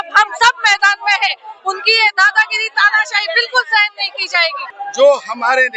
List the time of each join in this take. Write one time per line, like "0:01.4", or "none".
0:04.6